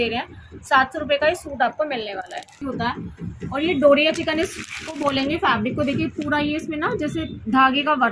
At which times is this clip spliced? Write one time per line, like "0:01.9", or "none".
0:02.5